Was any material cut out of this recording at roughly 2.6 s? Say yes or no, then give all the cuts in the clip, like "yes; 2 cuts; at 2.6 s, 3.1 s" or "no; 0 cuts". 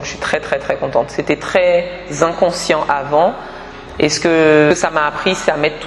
no; 1 cut; at 4.7 s